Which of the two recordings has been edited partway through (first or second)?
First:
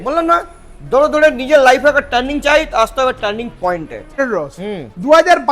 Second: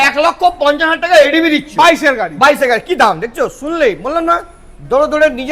first